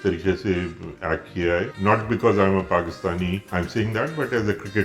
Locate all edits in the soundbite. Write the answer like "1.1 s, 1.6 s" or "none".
1.7 s, 3.4 s